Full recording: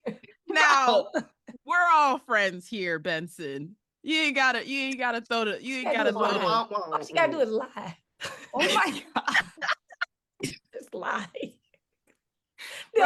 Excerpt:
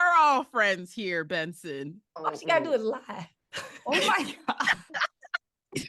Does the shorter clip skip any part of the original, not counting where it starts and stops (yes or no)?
yes